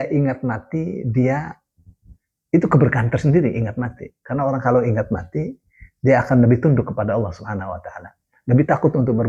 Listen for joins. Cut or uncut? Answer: uncut